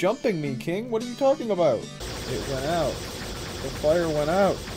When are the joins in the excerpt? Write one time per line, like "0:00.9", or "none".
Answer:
0:02.0

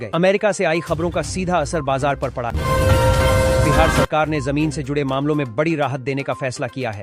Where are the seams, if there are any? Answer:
0:02.5
0:03.9

